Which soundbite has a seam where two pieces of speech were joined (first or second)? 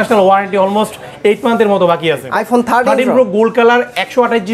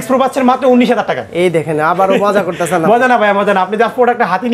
first